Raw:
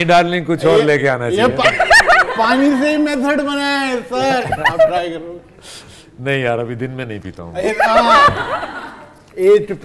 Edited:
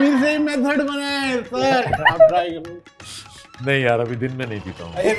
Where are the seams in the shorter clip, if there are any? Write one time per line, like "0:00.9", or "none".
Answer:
none